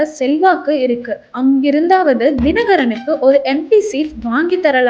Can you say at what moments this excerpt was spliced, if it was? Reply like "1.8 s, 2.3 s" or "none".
2.2 s